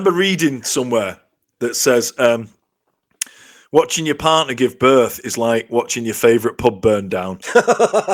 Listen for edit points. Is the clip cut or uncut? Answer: uncut